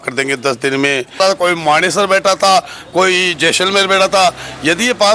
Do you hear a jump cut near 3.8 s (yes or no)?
no